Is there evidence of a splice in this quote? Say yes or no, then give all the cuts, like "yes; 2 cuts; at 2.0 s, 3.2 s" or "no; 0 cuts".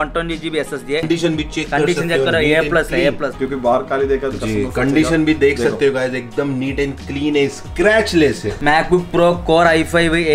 yes; 3 cuts; at 1.1 s, 3.4 s, 8.6 s